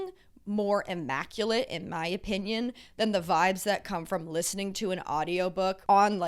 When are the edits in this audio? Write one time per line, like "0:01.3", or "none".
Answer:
none